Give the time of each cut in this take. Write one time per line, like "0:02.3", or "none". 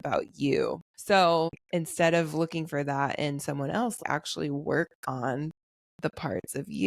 0:00.9
0:01.6
0:04.0